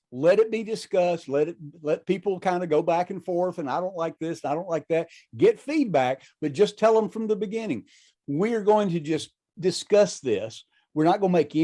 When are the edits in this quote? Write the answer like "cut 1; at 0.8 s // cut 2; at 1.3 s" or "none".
cut 1; at 1.2 s

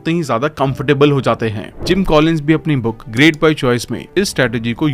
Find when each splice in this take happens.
cut 1; at 1.7 s

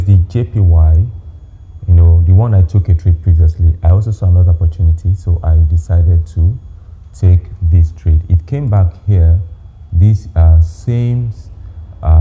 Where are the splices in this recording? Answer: none

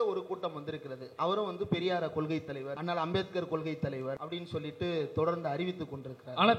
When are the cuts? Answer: cut 1; at 2.7 s // cut 2; at 4.2 s

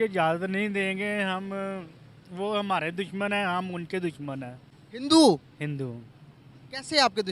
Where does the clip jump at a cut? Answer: none

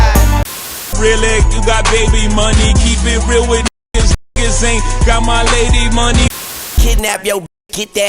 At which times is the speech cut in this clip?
cut 1; at 0.9 s // cut 2; at 6.8 s

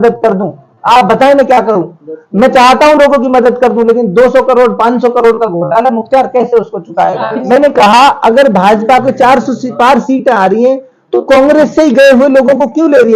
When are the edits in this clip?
cut 1; at 7.4 s

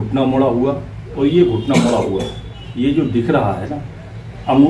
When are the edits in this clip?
none

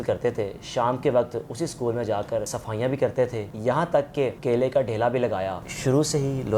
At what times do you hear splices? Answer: cut 1; at 2.6 s // cut 2; at 3.5 s // cut 3; at 5.7 s

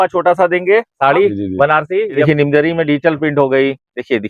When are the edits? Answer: cut 1; at 2.2 s

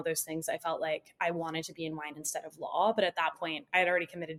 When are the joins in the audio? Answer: none

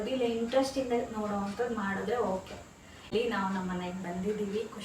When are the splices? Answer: cut 1; at 3.1 s

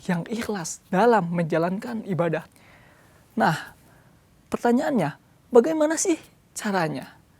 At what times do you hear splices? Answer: cut 1; at 2.5 s

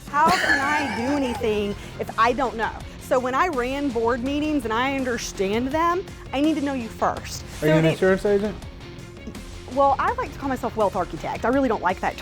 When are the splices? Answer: cut 1; at 7.5 s

